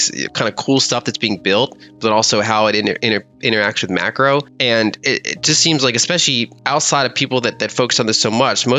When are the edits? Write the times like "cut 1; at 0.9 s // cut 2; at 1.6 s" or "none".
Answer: cut 1; at 4.5 s // cut 2; at 6.6 s